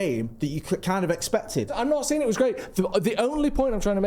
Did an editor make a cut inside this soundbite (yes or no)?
yes